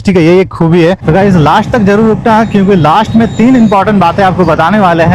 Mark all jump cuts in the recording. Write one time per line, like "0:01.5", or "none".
0:01.1

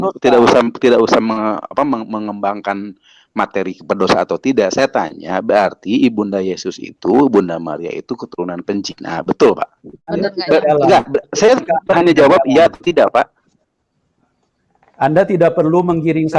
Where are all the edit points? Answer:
0:10.1

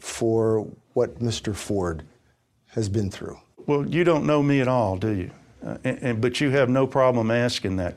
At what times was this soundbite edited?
0:03.6

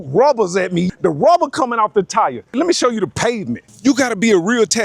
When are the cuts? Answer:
0:00.9
0:02.5
0:03.7

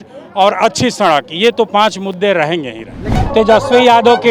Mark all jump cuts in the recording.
0:03.1

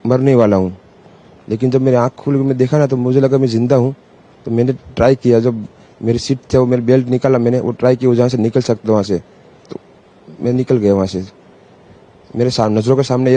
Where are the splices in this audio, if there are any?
none

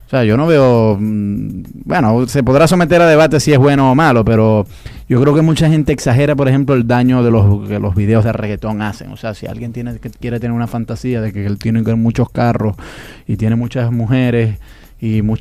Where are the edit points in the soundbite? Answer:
0:11.1

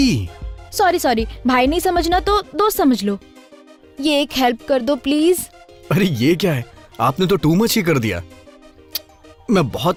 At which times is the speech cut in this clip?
none

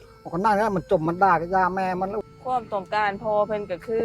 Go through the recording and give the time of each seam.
0:02.3

